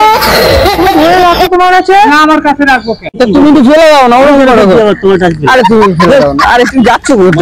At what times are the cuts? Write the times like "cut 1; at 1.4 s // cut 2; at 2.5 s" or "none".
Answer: cut 1; at 3.1 s